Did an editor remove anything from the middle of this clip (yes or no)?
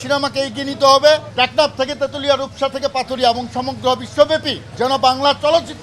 yes